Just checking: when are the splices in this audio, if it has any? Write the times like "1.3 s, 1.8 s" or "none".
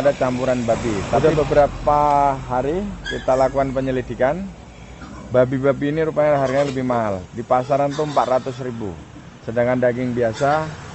1.2 s